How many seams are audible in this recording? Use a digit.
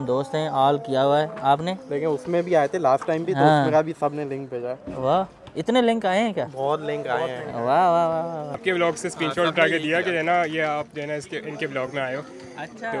1